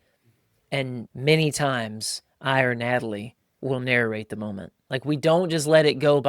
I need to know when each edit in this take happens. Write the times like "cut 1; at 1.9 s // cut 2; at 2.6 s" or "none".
cut 1; at 1.1 s